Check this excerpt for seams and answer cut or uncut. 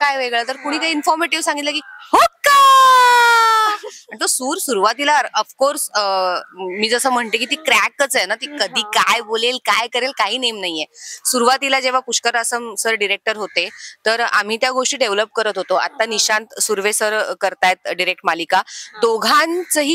uncut